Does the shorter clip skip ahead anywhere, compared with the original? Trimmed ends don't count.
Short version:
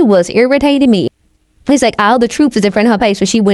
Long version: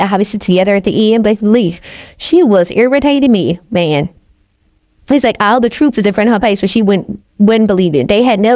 yes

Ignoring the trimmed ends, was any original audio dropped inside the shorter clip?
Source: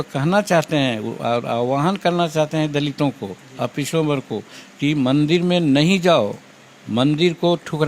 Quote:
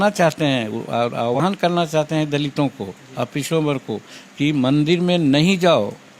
yes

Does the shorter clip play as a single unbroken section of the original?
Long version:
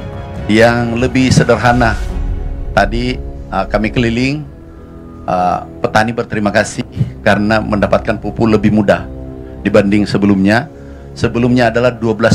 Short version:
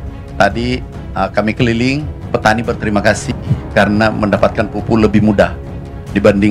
no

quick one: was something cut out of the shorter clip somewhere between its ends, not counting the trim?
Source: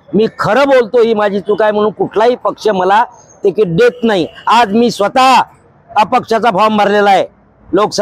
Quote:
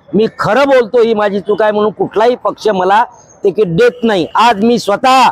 yes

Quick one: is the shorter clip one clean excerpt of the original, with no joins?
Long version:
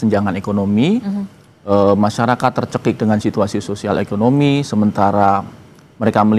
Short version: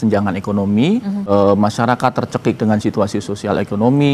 no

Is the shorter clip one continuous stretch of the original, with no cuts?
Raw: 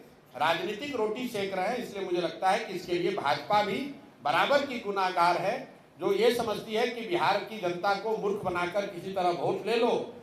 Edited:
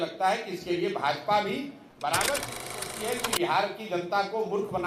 no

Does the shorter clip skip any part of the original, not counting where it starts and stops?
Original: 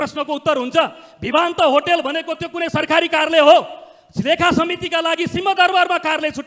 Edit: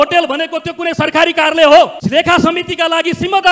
yes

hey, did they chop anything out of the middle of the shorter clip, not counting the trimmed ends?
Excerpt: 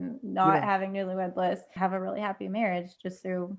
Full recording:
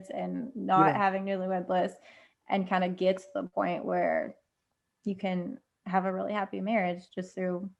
yes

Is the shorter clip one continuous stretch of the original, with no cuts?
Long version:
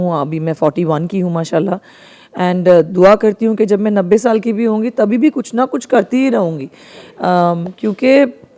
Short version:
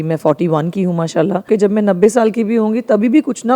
no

